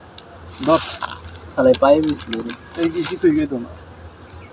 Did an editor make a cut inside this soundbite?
no; 0 cuts

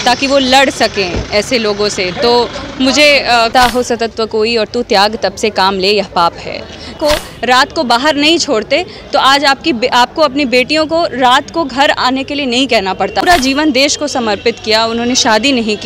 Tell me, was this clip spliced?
yes; 3 cuts; at 3.5 s, 7.0 s, 13.2 s

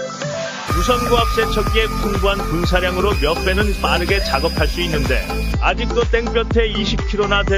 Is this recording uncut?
yes; 0 cuts

